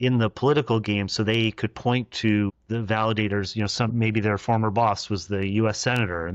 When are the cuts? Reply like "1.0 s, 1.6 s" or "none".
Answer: 2.6 s